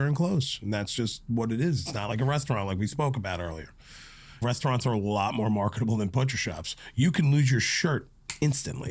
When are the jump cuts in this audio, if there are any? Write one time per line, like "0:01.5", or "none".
0:04.4